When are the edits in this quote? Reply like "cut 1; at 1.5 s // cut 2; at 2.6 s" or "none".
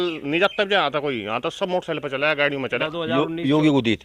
cut 1; at 2.8 s